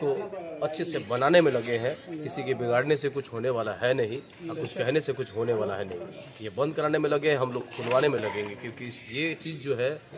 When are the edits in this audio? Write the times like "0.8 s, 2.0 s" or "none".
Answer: none